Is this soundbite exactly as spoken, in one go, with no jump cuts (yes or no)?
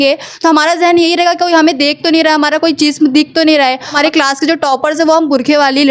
no